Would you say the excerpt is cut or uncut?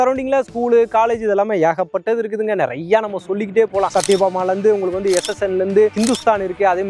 cut